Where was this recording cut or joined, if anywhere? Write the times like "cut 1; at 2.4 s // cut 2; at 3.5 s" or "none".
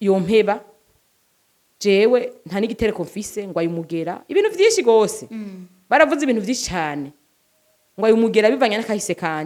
none